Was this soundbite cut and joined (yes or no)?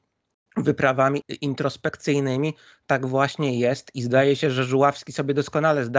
yes